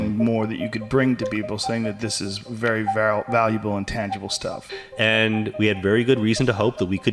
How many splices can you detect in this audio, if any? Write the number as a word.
one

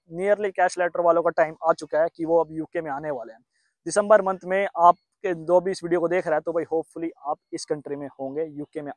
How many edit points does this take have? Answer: zero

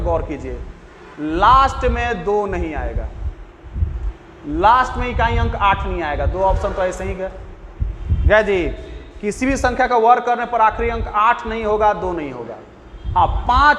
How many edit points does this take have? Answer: zero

